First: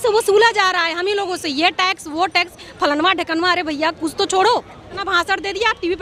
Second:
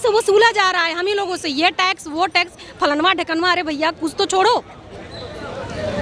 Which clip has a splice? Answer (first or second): first